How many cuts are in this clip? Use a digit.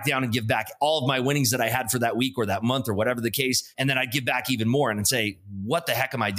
1